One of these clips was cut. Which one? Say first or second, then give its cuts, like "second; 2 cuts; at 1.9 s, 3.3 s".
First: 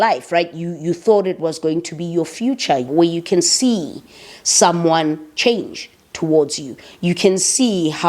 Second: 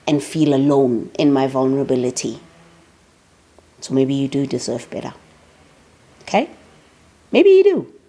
first; 1 cut; at 2.9 s